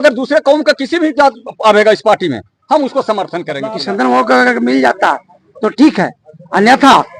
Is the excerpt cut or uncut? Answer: cut